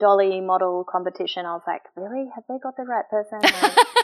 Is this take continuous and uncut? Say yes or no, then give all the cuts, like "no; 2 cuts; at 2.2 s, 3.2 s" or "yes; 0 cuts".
yes; 0 cuts